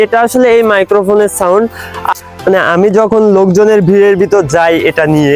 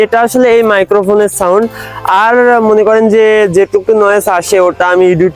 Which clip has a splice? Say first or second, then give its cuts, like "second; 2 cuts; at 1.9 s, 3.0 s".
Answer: first; 1 cut; at 2.0 s